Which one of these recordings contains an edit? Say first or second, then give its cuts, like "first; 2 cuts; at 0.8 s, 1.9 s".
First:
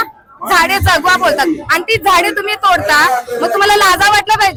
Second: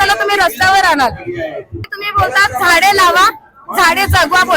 second; 1 cut; at 1.8 s